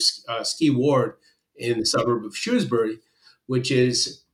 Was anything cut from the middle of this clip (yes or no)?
no